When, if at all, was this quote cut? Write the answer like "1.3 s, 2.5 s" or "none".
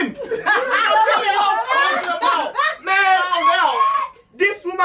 none